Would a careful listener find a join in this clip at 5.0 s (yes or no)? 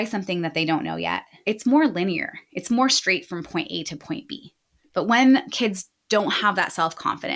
no